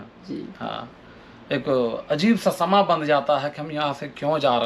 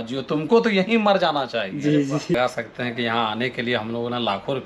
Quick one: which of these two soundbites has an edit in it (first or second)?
second